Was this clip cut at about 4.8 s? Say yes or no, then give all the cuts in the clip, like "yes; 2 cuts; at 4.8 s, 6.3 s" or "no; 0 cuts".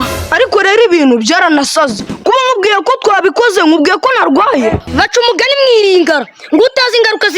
yes; 1 cut; at 4.8 s